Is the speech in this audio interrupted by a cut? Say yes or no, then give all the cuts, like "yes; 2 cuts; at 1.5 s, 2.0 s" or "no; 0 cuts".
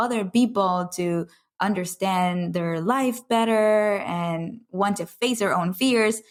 no; 0 cuts